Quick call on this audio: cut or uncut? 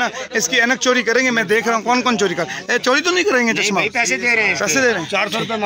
uncut